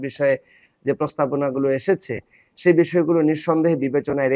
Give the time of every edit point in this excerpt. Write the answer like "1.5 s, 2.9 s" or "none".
none

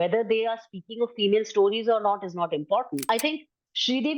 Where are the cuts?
3.1 s

